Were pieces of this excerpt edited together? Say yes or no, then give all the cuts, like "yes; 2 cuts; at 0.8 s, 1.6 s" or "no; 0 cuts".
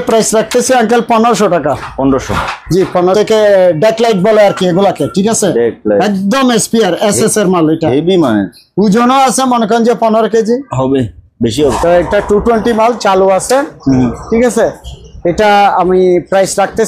yes; 2 cuts; at 3.1 s, 11.7 s